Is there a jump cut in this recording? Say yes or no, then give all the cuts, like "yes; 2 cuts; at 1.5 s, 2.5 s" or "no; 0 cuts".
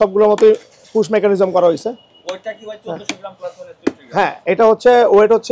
no; 0 cuts